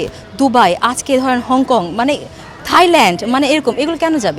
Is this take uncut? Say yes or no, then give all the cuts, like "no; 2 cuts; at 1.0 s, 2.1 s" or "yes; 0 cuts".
yes; 0 cuts